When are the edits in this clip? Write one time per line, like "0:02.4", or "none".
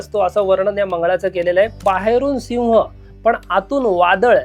0:01.8